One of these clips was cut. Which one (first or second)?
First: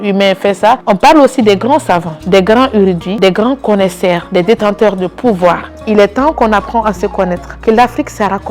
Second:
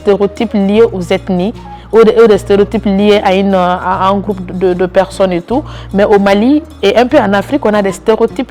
first